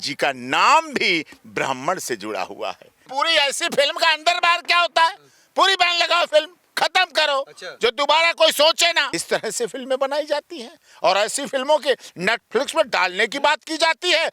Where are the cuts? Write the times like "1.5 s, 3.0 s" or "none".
3.1 s, 9.1 s